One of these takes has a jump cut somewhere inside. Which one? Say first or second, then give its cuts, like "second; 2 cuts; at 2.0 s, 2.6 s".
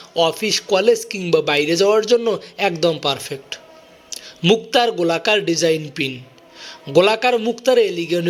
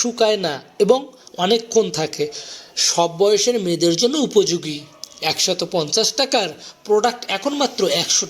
second; 1 cut; at 1.9 s